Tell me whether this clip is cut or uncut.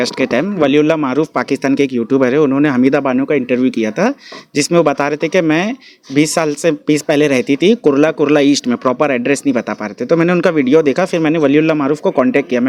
uncut